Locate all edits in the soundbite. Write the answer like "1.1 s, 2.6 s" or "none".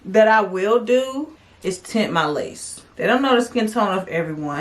2.8 s